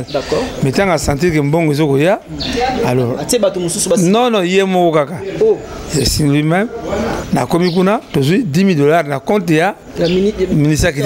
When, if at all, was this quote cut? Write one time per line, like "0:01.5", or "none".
0:07.2